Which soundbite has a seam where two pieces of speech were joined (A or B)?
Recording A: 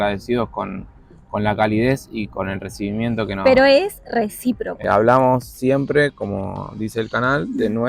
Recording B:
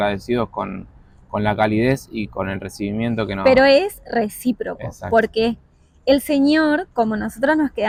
A